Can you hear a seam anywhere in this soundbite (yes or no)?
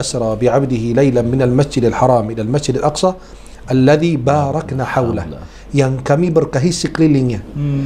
no